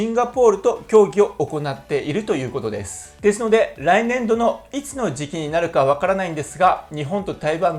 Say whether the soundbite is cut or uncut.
uncut